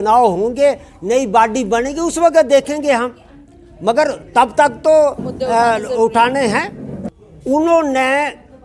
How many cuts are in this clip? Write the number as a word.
one